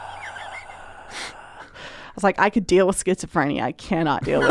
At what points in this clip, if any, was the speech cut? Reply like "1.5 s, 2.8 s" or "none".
none